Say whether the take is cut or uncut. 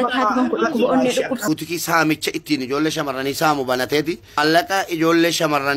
cut